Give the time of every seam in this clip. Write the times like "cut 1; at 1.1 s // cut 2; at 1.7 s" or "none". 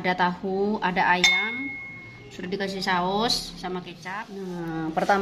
cut 1; at 4.0 s